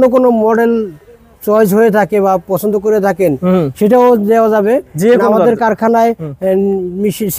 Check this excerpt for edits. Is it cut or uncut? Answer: uncut